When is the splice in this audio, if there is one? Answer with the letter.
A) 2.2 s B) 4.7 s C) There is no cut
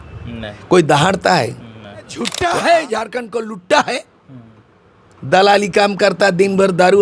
A